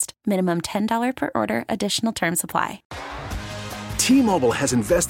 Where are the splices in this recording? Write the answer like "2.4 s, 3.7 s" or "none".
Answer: 2.9 s